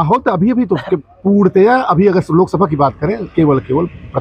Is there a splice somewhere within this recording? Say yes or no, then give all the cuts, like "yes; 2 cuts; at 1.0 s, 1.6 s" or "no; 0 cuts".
no; 0 cuts